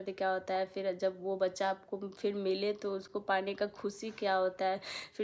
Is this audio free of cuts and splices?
yes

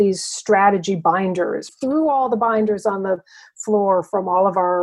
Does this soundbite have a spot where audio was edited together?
yes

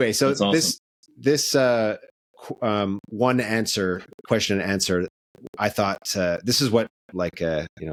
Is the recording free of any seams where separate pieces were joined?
yes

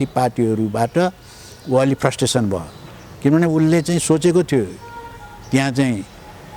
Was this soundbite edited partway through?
no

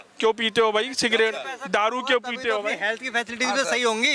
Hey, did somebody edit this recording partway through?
no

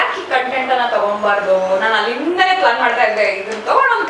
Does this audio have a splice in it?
no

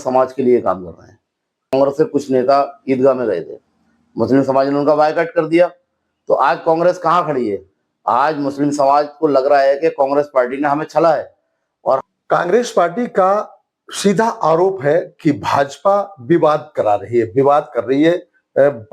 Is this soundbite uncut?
no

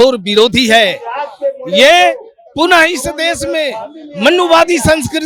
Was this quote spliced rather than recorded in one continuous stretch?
no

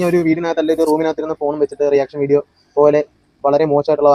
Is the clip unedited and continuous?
yes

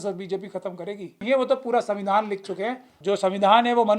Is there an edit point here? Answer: yes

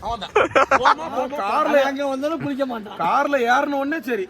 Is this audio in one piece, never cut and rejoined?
no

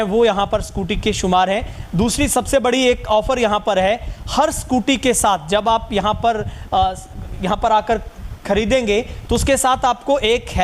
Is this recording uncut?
yes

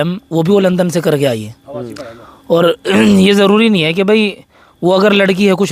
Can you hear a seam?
no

